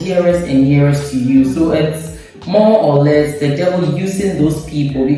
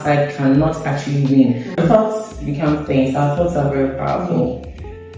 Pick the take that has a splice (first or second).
second